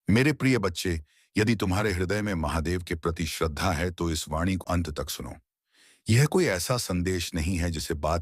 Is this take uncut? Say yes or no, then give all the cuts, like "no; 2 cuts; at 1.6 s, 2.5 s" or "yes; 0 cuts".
no; 1 cut; at 4.6 s